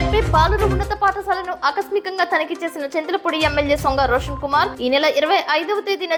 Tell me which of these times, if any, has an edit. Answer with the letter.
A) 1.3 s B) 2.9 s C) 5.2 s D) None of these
D